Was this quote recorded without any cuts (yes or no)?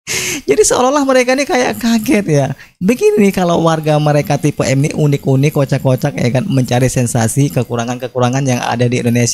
yes